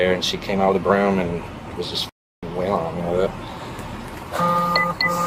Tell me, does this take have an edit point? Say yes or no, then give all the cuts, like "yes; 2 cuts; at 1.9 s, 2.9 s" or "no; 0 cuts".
no; 0 cuts